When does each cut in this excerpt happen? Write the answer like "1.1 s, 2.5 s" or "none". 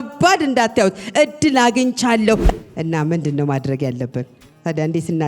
2.5 s